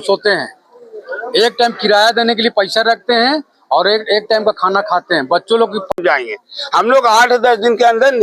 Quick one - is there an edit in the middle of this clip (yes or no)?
yes